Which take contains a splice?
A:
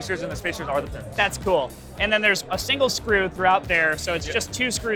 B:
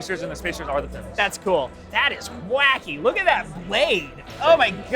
B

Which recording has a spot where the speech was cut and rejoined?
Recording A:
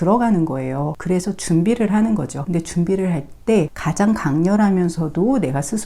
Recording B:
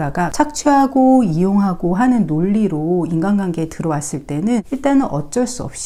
A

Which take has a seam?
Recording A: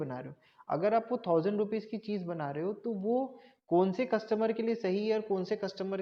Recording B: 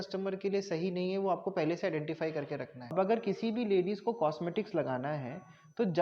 B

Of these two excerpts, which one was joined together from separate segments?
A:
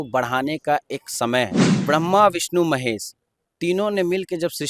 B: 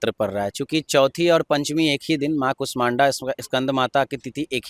A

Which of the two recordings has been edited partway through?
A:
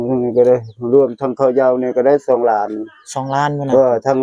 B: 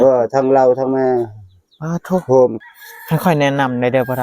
B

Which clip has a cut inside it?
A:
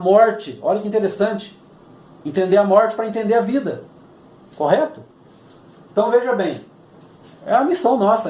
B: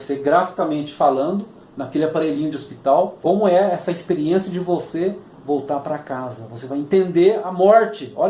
B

